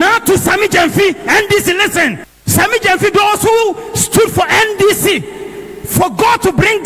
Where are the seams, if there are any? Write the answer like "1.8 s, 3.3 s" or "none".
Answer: 2.3 s